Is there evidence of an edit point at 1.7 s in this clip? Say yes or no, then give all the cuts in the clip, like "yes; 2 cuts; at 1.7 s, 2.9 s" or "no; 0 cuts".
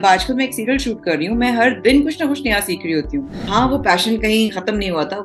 no; 1 cut; at 3.4 s